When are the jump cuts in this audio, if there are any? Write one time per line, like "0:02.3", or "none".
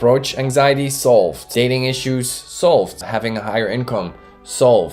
0:01.4
0:03.0